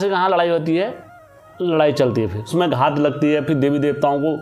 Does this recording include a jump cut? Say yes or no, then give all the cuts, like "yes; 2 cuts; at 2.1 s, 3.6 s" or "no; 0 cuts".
yes; 1 cut; at 2.5 s